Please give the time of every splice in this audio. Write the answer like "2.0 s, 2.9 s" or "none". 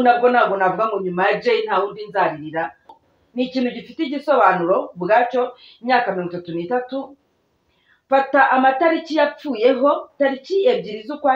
3.0 s